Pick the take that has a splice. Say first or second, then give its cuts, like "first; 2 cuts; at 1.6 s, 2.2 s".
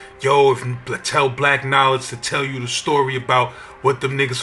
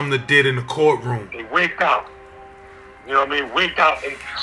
second; 1 cut; at 1.3 s